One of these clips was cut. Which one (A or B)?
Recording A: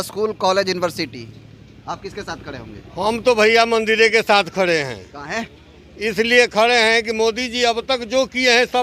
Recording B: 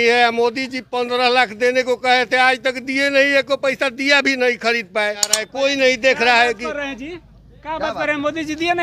B